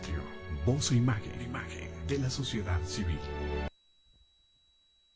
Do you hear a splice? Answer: yes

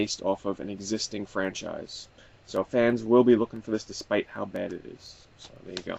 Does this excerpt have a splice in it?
no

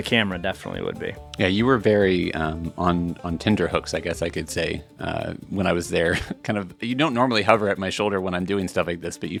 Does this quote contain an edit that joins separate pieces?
no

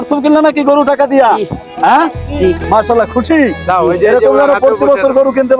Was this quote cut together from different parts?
no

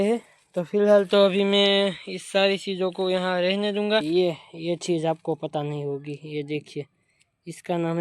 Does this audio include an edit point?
yes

